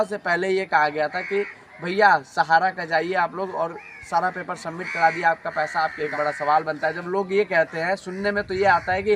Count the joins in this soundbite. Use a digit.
1